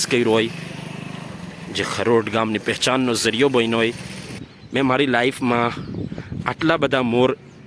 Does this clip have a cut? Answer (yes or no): yes